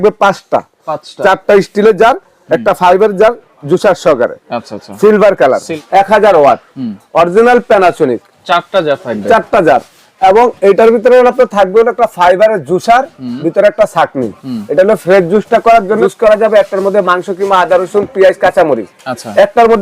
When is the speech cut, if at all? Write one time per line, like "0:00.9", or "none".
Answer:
0:05.7
0:16.0